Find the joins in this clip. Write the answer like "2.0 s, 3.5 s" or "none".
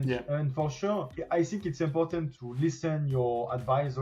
2.3 s